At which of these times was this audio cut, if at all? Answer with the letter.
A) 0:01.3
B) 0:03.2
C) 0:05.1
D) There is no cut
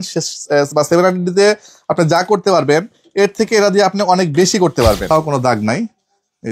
C